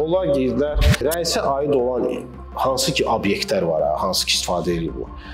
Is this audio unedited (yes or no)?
no